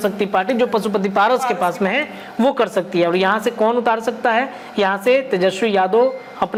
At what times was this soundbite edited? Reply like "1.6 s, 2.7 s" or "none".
none